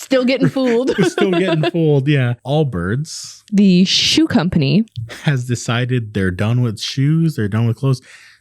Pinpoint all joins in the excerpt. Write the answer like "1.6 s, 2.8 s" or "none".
2.4 s, 4.9 s